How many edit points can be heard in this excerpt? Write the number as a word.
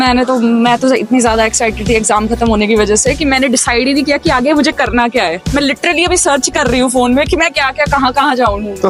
zero